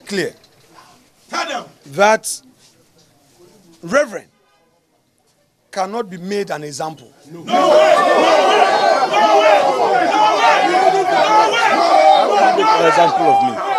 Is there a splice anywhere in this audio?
no; 0 cuts

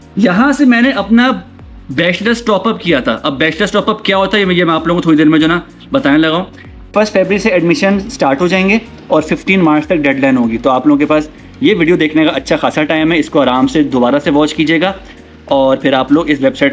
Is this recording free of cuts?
no; 1 cut; at 6.9 s

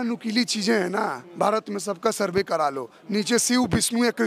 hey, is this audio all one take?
yes; 0 cuts

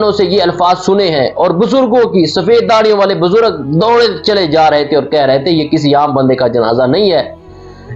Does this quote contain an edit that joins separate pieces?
no; 0 cuts

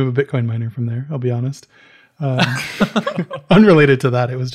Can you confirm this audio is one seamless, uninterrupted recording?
yes; 0 cuts

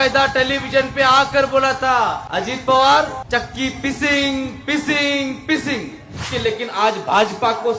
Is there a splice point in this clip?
yes; 3 cuts; at 2.2 s, 3.2 s, 6.3 s

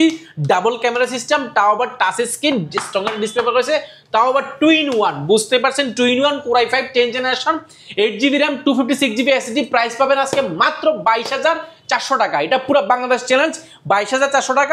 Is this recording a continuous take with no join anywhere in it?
yes; 0 cuts

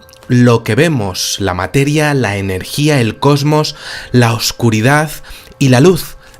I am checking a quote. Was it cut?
yes; 1 cut; at 3.1 s

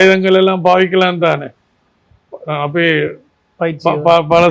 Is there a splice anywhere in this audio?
no; 0 cuts

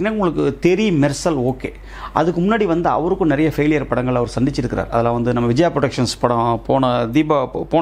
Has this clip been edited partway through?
no; 0 cuts

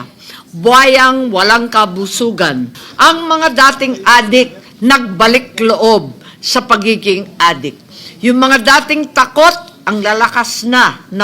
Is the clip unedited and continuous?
no; 1 cut; at 2.8 s

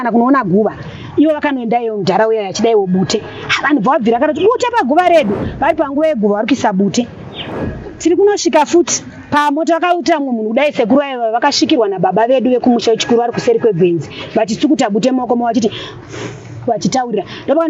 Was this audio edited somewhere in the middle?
no; 0 cuts

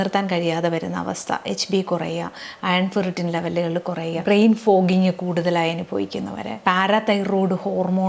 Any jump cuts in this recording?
yes; 2 cuts; at 4.2 s, 6.6 s

